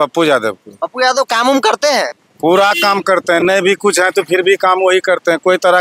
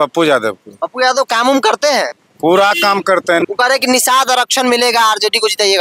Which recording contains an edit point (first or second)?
second